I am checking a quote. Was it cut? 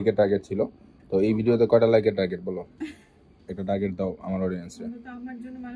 no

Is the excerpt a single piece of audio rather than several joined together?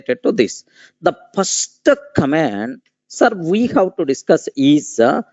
yes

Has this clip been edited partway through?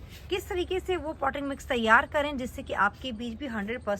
no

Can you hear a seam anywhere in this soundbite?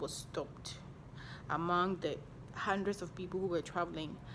no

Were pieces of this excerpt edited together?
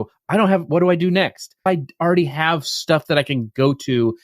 yes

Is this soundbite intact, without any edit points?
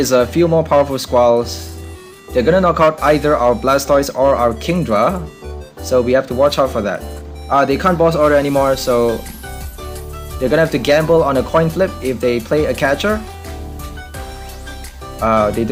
yes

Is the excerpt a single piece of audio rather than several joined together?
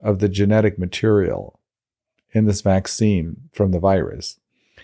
no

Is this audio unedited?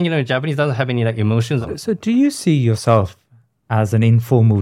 no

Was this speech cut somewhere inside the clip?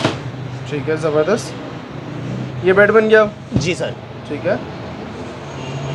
no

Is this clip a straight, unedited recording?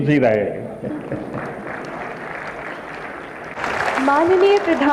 no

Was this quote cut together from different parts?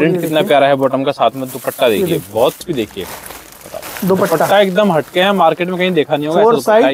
yes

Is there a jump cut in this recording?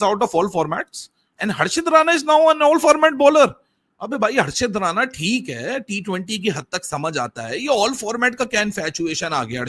no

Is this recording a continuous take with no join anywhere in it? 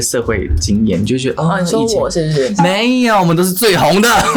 yes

